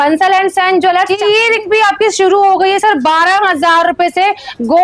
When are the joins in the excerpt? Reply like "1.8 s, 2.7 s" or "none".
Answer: 1.2 s